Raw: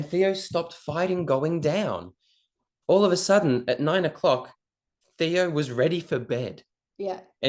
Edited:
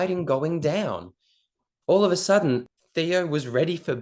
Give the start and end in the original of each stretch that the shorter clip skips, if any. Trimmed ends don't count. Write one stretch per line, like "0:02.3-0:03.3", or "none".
0:03.6-0:04.9